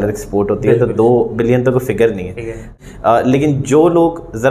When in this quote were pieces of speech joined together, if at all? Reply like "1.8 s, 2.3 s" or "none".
2.7 s